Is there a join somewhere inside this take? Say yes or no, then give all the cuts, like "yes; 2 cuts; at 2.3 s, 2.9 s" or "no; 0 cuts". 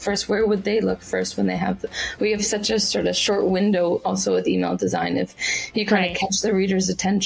no; 0 cuts